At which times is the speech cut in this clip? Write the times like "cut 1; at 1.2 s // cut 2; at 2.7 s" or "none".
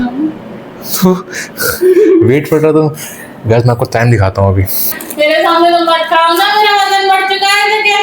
cut 1; at 5.0 s